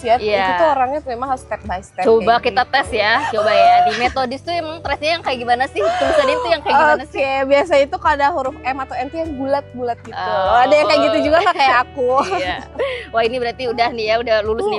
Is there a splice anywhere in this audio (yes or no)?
no